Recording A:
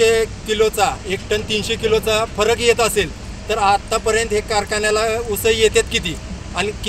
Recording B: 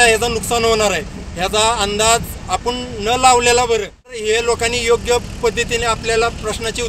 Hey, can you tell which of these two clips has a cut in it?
B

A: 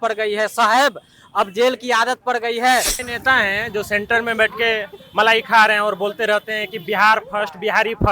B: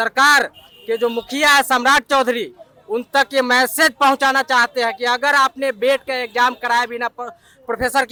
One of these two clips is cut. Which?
A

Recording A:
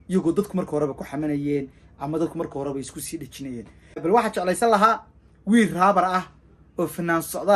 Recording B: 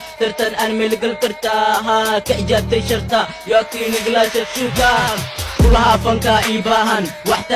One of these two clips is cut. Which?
A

